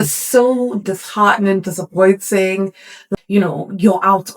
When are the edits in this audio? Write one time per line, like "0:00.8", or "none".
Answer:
0:03.0